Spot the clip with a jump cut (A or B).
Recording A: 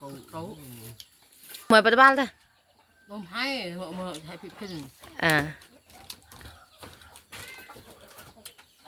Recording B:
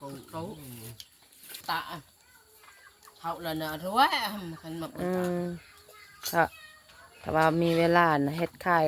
B